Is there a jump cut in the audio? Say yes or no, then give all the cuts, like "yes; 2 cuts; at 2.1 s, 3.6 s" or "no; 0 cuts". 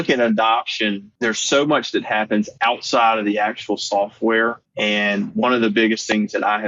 yes; 2 cuts; at 1.1 s, 4.7 s